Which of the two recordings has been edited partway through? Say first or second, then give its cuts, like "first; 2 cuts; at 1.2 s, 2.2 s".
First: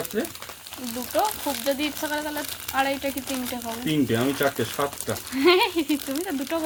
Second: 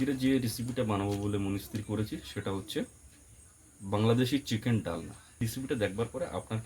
second; 1 cut; at 5.4 s